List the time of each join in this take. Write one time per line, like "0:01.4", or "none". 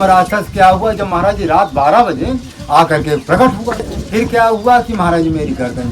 0:03.8